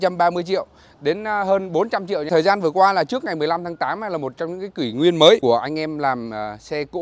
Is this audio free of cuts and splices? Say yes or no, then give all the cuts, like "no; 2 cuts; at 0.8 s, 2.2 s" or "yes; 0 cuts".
no; 2 cuts; at 2.3 s, 5.4 s